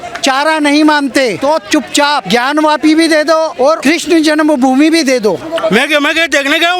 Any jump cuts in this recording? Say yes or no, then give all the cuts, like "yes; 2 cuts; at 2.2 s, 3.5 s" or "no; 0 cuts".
yes; 4 cuts; at 1.4 s, 2.2 s, 3.6 s, 5.5 s